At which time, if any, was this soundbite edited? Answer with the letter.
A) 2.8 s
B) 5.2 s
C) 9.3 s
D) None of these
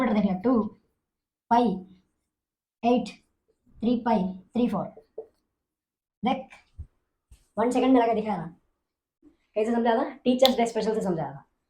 C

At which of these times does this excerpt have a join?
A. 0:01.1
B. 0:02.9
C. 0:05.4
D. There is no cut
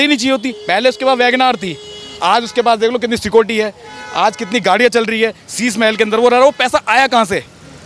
D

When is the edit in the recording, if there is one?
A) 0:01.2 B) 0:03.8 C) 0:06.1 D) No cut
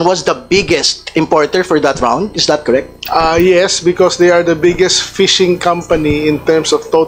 D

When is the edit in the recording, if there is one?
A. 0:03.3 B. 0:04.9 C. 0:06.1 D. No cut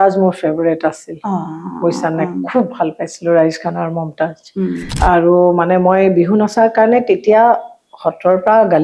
B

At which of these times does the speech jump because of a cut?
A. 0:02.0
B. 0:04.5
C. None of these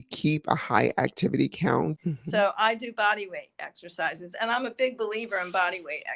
A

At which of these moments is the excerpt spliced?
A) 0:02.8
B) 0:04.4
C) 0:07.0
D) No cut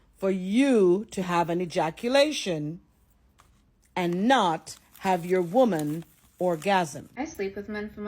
C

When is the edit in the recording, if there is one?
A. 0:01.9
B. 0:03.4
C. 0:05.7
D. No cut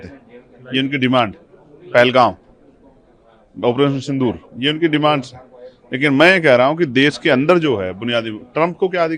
D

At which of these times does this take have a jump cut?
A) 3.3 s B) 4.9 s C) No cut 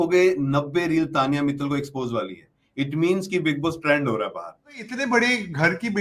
B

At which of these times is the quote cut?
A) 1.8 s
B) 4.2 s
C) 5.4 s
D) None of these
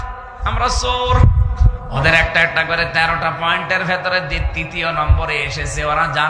A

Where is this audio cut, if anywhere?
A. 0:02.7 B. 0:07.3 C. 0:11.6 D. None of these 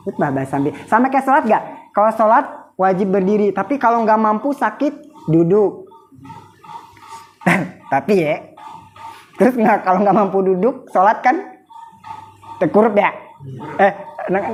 D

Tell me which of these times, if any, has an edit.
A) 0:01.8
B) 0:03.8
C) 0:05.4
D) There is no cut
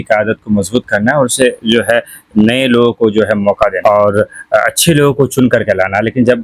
B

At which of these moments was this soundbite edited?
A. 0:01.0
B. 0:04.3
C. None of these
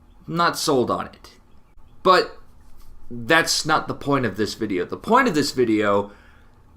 B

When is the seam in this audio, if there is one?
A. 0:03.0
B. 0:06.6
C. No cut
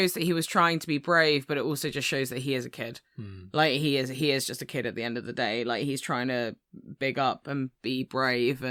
C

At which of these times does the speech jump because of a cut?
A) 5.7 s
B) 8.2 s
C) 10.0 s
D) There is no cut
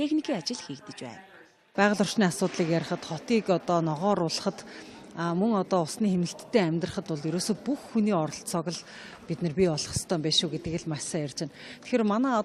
C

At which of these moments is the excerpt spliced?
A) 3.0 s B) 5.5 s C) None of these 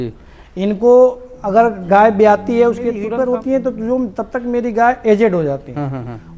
A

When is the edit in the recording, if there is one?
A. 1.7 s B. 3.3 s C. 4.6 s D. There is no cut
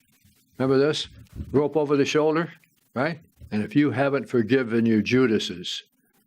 B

